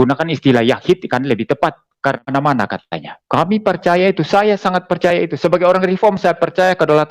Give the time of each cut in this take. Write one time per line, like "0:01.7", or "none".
0:02.2